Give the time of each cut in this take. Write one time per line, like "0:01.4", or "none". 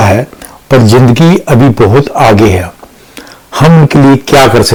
none